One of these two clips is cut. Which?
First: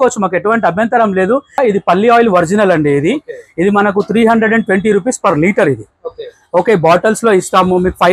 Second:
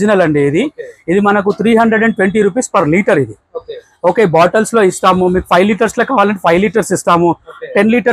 first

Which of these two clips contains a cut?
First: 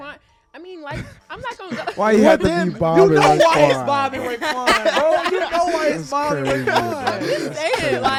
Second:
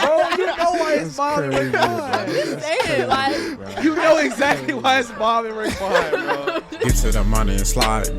second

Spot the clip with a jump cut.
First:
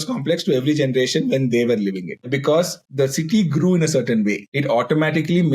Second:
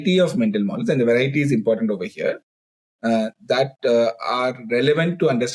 first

